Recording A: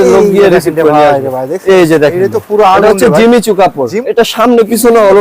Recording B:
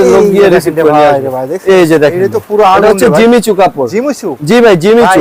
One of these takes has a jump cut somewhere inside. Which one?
A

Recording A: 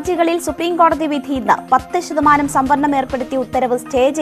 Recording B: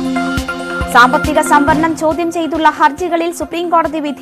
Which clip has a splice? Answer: B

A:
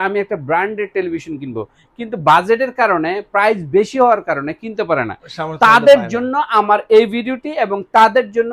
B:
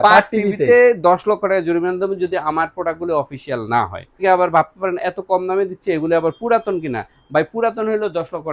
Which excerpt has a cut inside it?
B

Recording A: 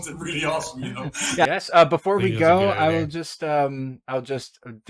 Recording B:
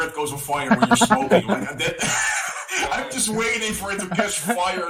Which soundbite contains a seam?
A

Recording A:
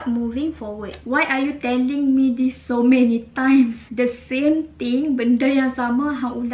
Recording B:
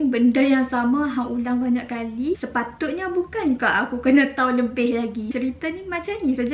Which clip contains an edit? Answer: B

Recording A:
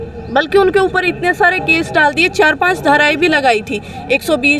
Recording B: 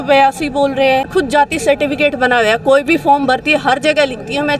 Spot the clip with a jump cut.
B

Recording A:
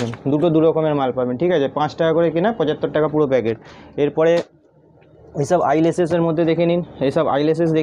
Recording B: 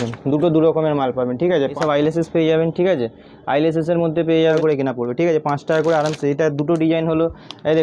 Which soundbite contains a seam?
B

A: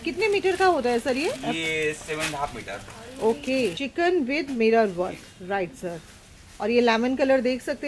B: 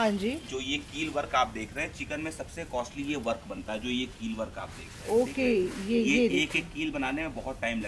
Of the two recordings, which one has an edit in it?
A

